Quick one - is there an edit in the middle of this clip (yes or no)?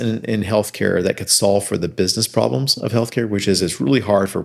no